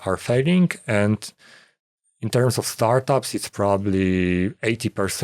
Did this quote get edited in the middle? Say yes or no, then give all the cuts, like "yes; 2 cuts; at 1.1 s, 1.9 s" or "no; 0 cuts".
no; 0 cuts